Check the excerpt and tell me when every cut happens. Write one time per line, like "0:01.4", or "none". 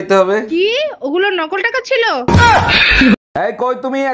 0:02.9